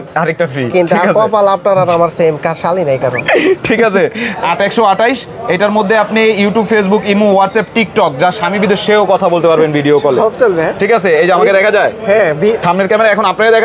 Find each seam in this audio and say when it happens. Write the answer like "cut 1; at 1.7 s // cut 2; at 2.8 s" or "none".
cut 1; at 4.3 s // cut 2; at 12.6 s